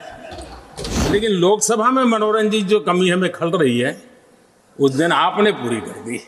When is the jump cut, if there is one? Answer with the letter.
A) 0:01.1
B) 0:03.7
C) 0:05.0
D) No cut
A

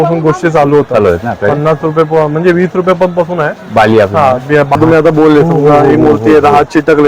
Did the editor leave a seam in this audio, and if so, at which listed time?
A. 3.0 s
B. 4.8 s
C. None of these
B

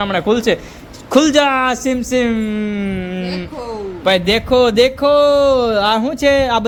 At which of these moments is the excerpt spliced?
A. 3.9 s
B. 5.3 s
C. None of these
C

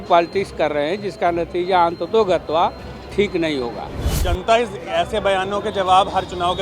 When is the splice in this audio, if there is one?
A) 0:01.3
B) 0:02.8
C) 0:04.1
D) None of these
C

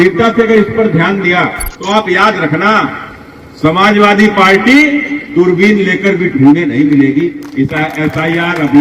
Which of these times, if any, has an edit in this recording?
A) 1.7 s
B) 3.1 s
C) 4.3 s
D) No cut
A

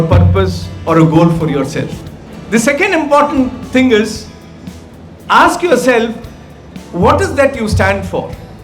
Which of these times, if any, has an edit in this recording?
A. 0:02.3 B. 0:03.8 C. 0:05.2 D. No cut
D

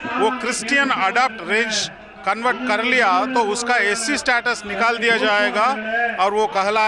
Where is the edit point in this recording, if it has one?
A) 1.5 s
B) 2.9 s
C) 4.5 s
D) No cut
D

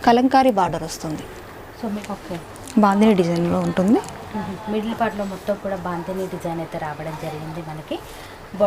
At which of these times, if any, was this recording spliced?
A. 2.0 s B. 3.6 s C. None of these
A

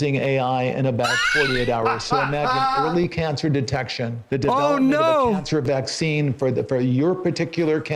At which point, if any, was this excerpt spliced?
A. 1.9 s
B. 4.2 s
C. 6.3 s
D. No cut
B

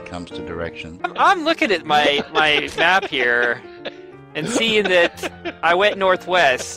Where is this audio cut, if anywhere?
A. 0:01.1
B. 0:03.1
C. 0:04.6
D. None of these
A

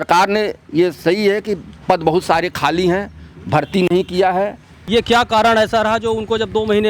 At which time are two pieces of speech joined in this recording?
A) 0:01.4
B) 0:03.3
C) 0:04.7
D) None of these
C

